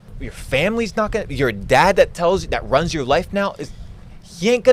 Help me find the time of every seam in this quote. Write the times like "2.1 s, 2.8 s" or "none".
none